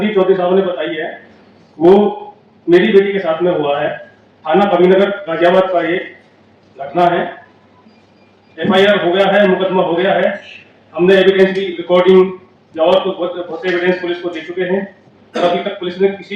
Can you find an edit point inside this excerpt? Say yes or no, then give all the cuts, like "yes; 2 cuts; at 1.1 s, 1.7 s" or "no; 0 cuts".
no; 0 cuts